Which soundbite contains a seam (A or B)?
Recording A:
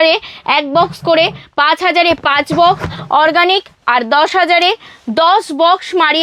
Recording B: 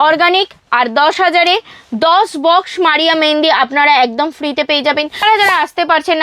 B